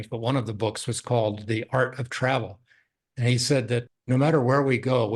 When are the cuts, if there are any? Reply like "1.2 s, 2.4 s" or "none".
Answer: 3.9 s